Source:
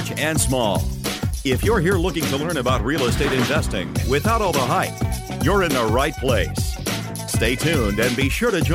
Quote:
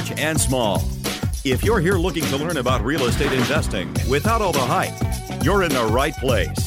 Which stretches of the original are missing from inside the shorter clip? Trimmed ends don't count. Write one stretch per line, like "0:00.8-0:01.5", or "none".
none

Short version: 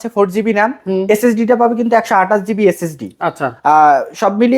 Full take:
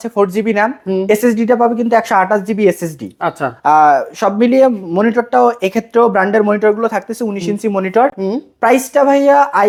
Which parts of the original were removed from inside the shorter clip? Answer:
none

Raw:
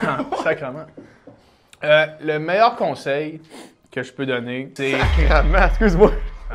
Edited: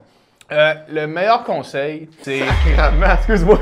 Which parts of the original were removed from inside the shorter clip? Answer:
0:03.5-0:04.7

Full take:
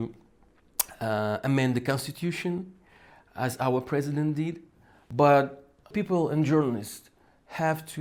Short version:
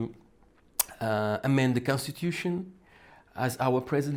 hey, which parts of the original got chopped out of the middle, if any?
none

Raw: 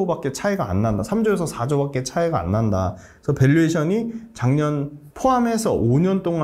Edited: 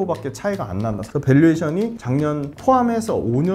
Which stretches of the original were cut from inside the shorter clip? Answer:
0:01.0-0:03.1
0:04.4-0:04.8

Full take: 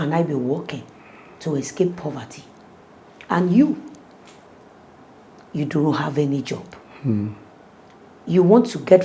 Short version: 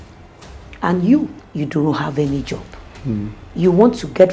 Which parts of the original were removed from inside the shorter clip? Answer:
0:03.9-0:05.4
0:07.4-0:08.1

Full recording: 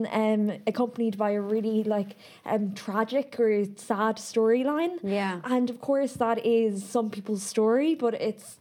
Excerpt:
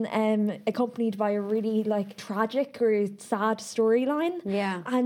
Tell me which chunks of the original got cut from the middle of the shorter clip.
0:02.2-0:02.8

